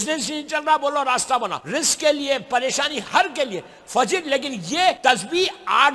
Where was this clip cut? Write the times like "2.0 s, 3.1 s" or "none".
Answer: 1.6 s, 5.0 s